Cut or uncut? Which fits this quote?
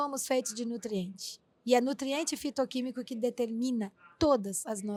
uncut